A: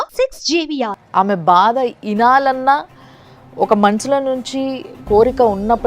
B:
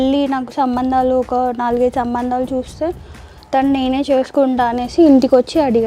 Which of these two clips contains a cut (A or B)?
A